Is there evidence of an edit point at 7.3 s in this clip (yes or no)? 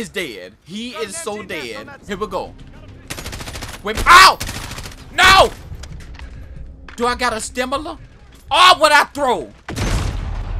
no